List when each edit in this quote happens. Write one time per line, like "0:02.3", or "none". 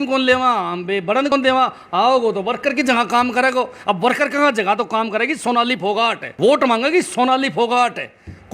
0:01.3
0:06.2